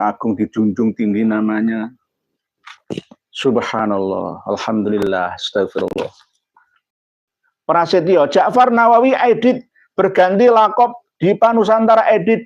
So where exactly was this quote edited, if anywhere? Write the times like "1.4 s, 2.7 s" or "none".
7.0 s